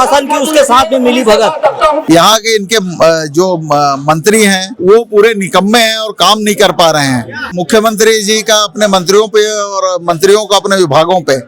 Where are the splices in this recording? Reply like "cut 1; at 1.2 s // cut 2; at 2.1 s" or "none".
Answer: cut 1; at 2.0 s // cut 2; at 4.7 s // cut 3; at 7.6 s